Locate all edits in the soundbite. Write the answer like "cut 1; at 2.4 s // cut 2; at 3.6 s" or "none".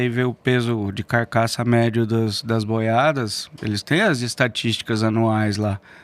none